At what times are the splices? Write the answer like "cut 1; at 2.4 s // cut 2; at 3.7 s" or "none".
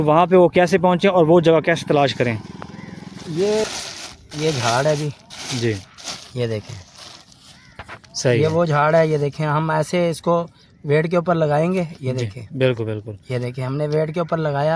cut 1; at 3.6 s